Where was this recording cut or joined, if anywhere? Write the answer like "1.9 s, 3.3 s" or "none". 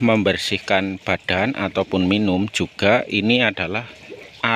none